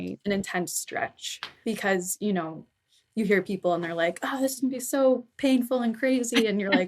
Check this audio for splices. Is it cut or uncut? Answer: cut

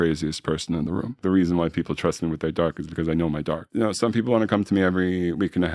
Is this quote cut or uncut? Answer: cut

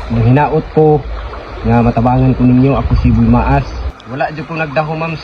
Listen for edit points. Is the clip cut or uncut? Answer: cut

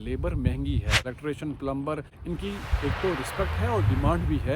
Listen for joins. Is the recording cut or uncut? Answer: cut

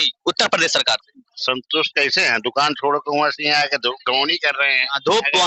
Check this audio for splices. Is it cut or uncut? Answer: uncut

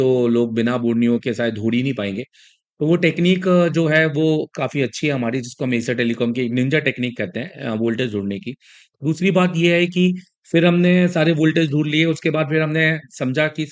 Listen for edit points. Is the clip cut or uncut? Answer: uncut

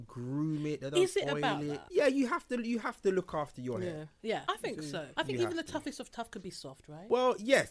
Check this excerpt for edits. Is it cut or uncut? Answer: cut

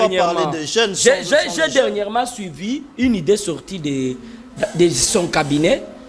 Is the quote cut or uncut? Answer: uncut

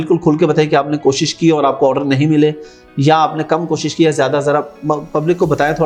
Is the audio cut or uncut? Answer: uncut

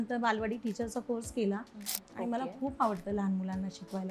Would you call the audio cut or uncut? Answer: cut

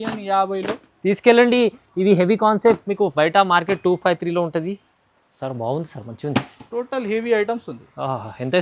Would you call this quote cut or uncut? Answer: cut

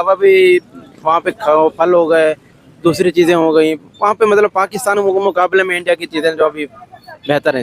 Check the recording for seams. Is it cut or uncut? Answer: uncut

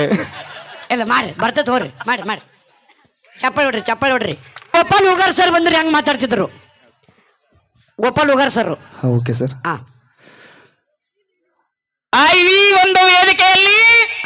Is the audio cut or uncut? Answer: cut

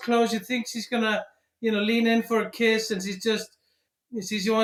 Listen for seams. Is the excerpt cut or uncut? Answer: uncut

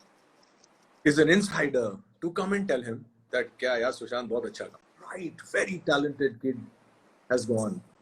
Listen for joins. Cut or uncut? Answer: cut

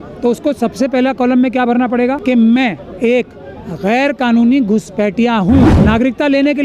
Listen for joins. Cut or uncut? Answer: cut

